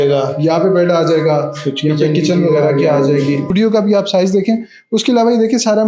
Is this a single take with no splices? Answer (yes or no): no